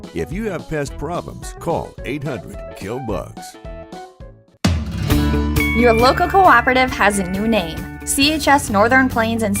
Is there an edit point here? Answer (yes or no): yes